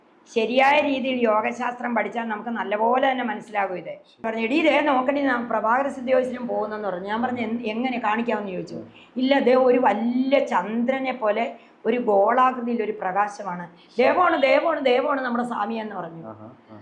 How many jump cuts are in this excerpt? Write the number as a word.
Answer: one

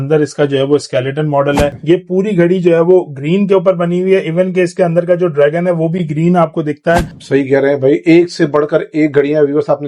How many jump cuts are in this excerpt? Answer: two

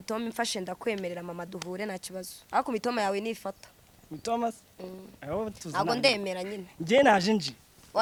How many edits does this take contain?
zero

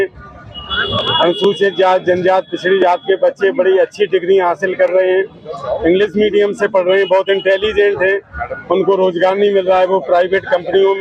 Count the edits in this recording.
zero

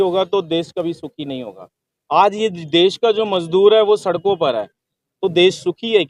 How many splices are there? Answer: zero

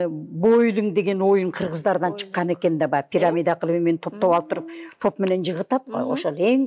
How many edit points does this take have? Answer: zero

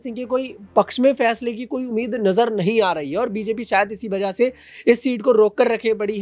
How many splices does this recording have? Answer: zero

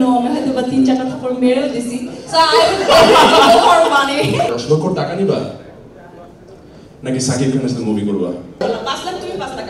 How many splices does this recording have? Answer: two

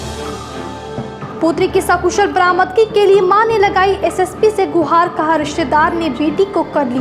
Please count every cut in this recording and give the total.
one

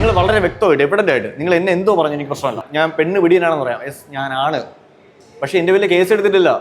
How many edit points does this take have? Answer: one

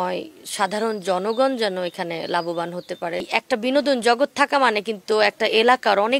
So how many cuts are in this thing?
one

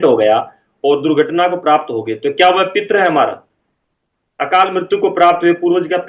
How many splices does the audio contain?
zero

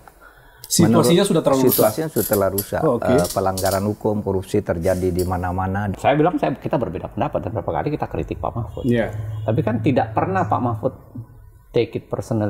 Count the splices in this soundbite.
one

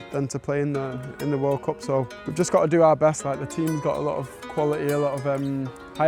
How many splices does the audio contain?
one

